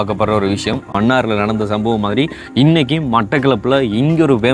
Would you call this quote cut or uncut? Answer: cut